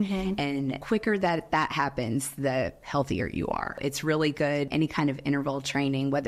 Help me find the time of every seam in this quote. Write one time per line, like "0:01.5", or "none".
0:03.8
0:04.7